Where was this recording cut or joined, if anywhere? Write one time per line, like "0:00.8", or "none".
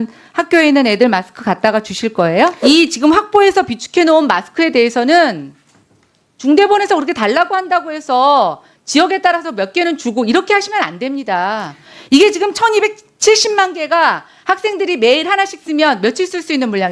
0:02.6